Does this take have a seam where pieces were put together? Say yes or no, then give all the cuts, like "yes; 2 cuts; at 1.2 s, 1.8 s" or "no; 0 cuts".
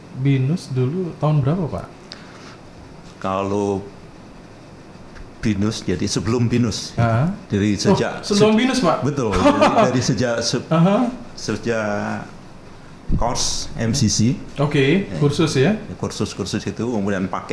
no; 0 cuts